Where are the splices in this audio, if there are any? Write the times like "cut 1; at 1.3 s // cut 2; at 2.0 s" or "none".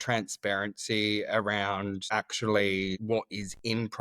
cut 1; at 2.0 s // cut 2; at 3.0 s